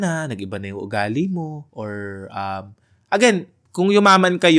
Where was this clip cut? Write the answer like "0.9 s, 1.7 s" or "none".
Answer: 1.6 s, 3.6 s